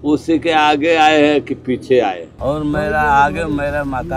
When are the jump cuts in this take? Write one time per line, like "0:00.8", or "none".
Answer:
0:02.3